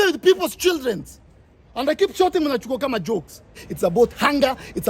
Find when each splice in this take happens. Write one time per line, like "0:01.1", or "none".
0:03.6